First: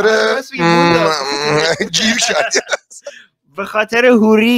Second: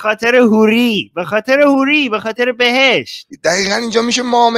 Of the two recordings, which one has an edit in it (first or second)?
second